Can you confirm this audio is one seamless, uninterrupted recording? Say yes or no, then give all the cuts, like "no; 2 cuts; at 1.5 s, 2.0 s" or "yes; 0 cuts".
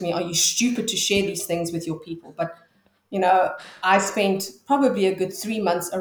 yes; 0 cuts